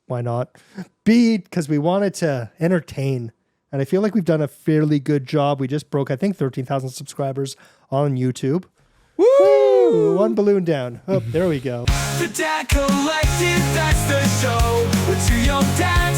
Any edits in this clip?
yes; 1 cut; at 11.8 s

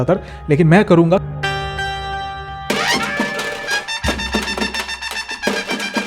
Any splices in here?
no; 0 cuts

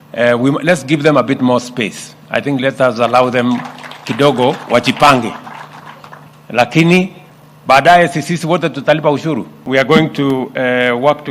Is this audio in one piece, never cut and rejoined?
no; 1 cut; at 9.6 s

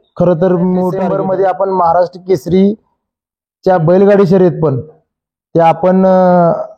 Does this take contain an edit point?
yes; 1 cut; at 1.0 s

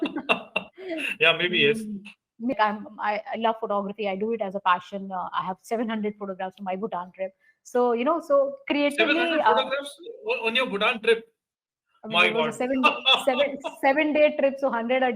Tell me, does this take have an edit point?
yes; 1 cut; at 2.5 s

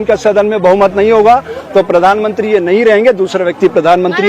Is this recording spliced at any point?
no; 0 cuts

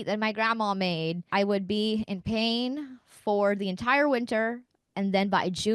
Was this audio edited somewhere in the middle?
yes; 1 cut; at 1.2 s

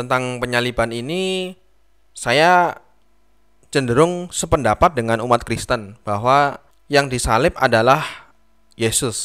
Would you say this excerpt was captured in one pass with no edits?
yes; 0 cuts

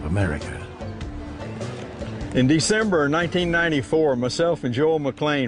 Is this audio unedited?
yes; 0 cuts

